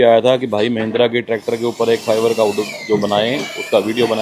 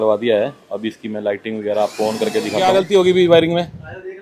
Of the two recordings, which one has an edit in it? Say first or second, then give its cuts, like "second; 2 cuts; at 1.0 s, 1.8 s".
second; 1 cut; at 2.7 s